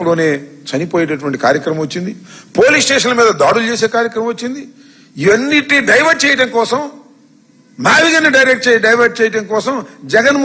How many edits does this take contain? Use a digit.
1